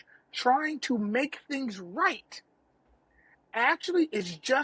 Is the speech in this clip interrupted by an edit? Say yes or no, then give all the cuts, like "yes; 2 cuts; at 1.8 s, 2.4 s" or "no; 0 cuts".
no; 0 cuts